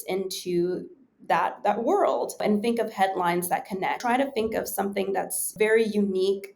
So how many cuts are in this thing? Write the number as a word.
three